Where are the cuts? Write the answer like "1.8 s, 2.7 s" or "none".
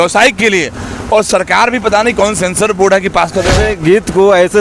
3.6 s